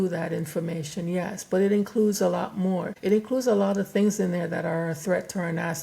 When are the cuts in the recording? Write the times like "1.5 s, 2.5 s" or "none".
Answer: 2.9 s